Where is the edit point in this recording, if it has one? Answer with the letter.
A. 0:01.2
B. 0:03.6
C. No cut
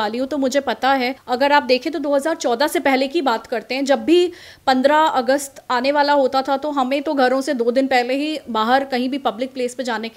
A